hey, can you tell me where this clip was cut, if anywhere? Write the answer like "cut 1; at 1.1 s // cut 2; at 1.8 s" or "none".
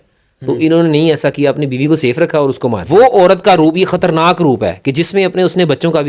cut 1; at 2.8 s